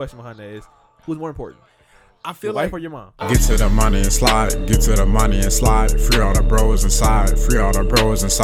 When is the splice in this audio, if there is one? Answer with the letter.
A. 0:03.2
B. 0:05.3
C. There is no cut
A